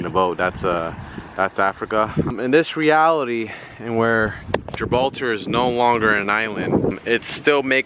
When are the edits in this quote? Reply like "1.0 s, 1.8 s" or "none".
2.3 s, 6.9 s